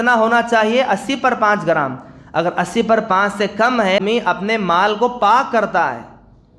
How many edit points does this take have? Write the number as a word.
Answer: one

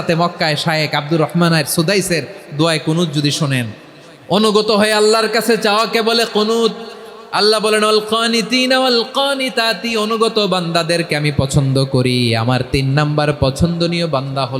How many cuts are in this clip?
zero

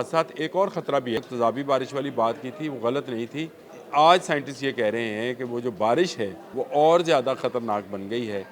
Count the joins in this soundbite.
three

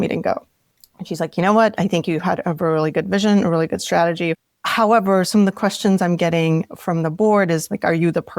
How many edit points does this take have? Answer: one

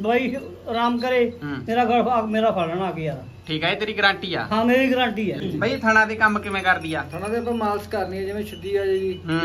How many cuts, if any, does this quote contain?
one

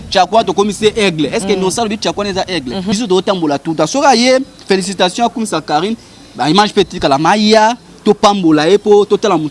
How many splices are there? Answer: one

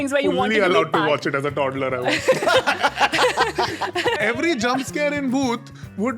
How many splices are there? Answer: one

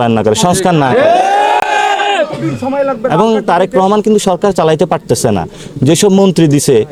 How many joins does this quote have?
zero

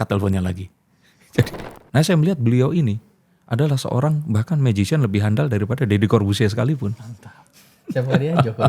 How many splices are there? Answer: one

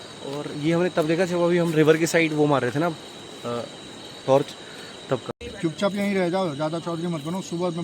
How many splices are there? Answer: one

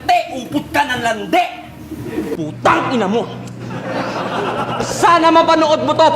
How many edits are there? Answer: one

